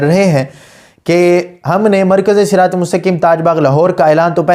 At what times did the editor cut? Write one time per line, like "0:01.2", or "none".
none